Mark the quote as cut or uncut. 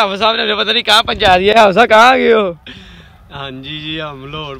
uncut